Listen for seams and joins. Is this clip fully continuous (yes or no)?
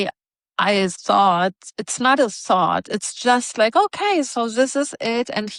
yes